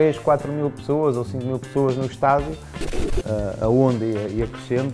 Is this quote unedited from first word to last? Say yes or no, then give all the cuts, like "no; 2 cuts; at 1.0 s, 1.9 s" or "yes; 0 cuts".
no; 1 cut; at 2.9 s